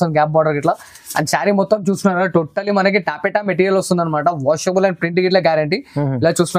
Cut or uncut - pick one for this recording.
uncut